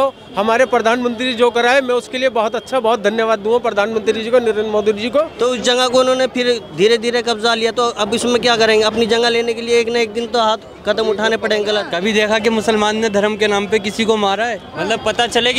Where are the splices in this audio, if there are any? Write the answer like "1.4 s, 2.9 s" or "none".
5.3 s, 11.9 s, 14.7 s